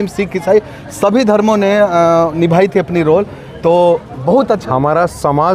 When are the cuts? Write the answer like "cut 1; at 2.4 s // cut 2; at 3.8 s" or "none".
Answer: cut 1; at 4.6 s